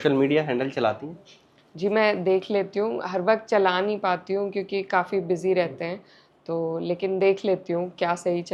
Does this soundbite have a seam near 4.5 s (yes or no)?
no